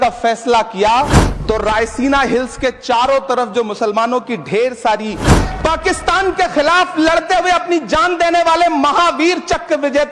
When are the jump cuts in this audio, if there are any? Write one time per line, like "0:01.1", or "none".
0:01.3
0:05.4